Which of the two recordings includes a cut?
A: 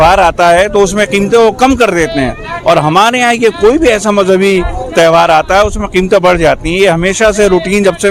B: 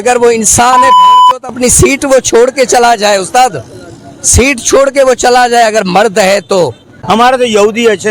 B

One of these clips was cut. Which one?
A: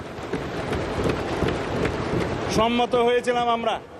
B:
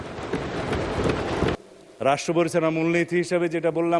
B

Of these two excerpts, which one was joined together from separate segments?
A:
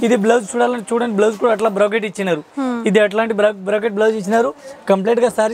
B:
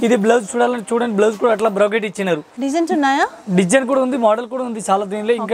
B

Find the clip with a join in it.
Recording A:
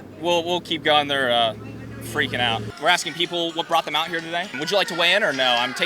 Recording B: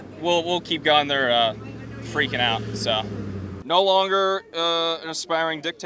A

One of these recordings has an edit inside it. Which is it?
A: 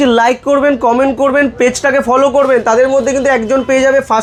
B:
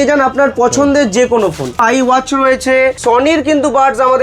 B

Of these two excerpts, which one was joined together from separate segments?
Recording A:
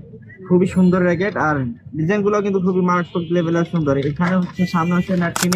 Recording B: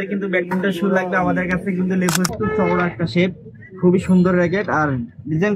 B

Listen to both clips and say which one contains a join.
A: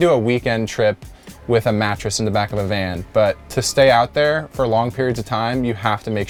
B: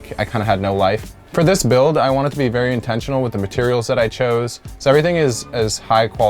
B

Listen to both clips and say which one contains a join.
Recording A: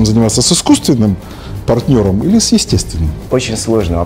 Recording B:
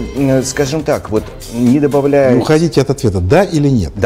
A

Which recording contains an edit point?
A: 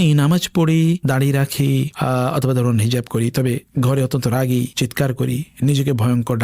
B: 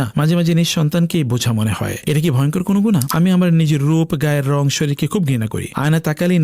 B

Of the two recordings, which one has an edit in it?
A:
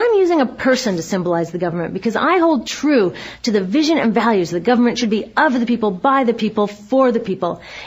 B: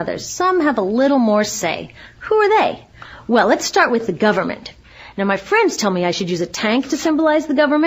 B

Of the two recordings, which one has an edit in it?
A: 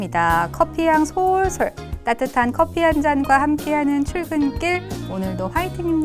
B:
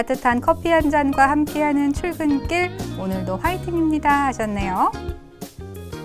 B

